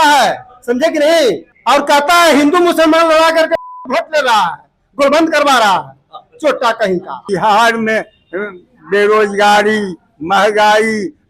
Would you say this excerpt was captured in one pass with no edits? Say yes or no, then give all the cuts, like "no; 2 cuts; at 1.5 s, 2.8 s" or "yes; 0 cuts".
no; 2 cuts; at 1.5 s, 7.1 s